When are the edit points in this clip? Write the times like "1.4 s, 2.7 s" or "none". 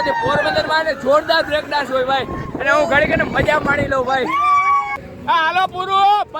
5.0 s